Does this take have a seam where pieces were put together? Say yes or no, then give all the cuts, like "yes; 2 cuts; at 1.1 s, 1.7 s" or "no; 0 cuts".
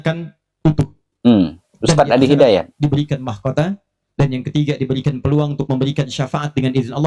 no; 0 cuts